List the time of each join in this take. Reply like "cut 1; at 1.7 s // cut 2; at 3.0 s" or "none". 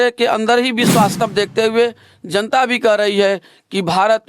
cut 1; at 1.1 s